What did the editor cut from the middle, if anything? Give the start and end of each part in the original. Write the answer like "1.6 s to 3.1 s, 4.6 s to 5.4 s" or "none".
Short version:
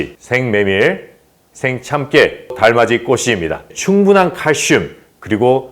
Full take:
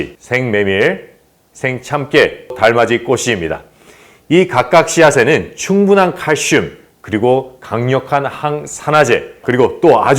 3.7 s to 5.5 s